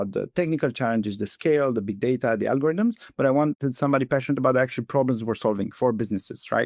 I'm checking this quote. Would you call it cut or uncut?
cut